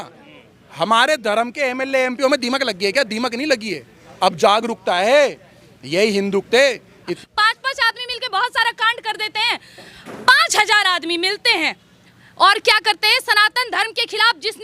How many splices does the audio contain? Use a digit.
1